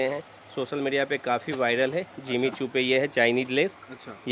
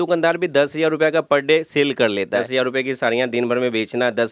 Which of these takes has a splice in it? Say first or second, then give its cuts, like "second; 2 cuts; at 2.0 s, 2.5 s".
second; 1 cut; at 2.5 s